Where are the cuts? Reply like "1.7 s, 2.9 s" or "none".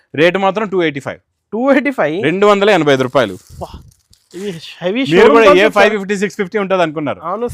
none